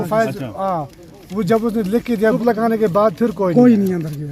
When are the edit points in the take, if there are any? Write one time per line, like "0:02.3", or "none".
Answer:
0:02.4